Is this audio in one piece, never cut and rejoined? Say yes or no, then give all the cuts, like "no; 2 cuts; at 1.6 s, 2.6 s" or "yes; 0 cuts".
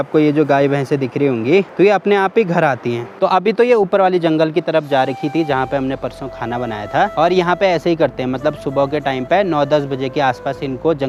yes; 0 cuts